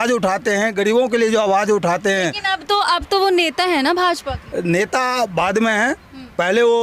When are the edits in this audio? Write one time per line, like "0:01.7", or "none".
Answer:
none